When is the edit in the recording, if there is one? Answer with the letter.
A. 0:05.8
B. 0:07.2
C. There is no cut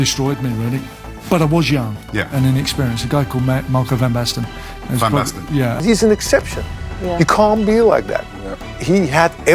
A